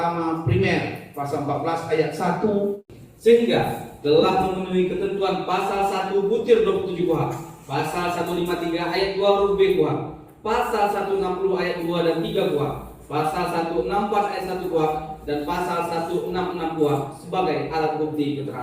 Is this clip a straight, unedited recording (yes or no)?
no